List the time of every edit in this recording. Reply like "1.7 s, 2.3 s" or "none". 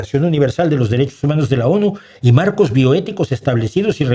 none